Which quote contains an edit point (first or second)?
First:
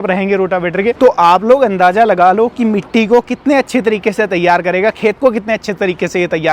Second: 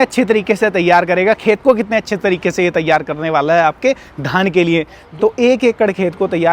second